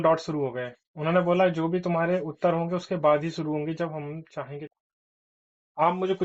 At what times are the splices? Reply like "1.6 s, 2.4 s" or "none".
4.6 s